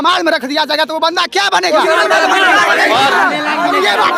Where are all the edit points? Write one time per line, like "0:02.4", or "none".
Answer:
none